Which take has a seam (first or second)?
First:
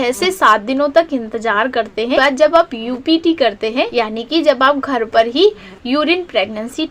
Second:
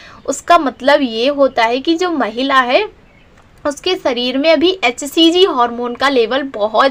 first